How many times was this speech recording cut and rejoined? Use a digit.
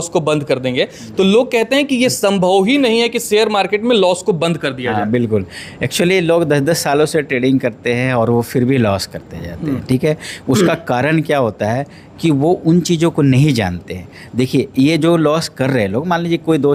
0